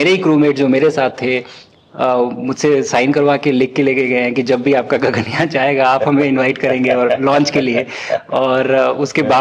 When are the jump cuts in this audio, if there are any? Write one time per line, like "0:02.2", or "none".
none